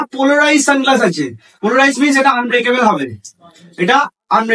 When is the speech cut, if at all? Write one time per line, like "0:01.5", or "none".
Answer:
none